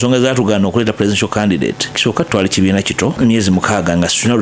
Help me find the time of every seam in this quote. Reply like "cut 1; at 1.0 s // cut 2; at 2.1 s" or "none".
cut 1; at 1.9 s // cut 2; at 3.2 s